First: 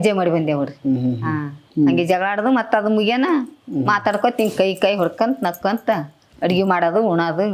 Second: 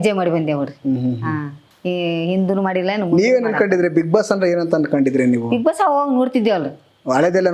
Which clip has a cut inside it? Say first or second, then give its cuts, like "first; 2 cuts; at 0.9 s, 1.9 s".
first; 1 cut; at 1.7 s